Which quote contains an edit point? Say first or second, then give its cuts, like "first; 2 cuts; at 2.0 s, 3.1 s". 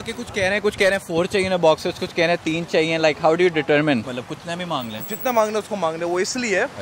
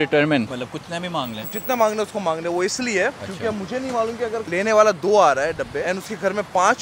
second; 2 cuts; at 4.5 s, 5.8 s